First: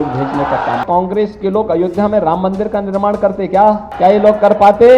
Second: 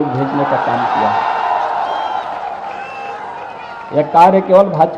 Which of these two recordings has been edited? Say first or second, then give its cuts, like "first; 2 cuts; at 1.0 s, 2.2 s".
first; 2 cuts; at 0.8 s, 3.9 s